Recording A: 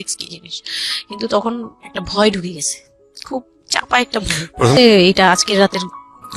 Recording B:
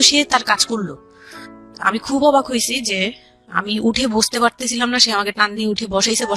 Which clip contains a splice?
A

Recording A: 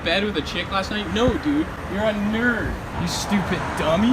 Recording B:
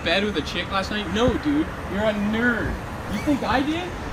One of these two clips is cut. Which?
A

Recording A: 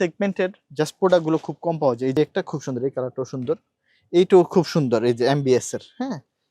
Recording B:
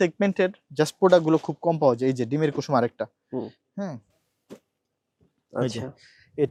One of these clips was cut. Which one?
A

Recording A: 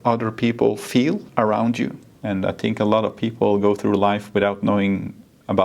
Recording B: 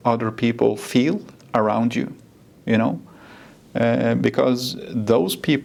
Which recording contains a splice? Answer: A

